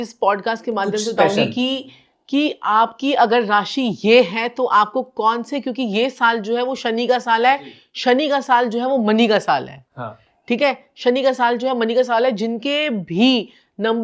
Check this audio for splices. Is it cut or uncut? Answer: uncut